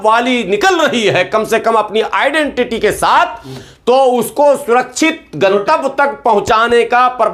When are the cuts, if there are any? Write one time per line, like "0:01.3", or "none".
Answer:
none